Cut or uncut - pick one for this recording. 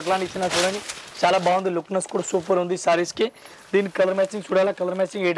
uncut